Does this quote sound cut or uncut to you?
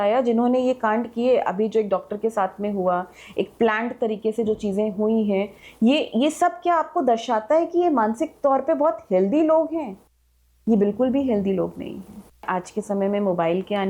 cut